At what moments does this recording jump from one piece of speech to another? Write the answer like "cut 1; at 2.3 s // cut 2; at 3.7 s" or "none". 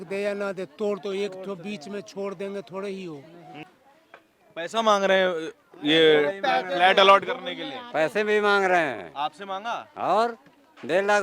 cut 1; at 3.7 s